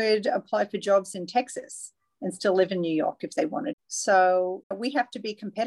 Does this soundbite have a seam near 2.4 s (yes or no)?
no